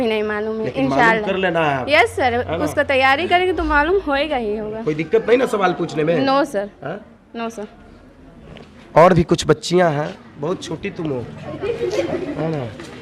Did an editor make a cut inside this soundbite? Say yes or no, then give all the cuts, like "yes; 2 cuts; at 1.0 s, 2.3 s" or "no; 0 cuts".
no; 0 cuts